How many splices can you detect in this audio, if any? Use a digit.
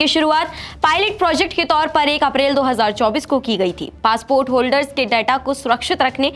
0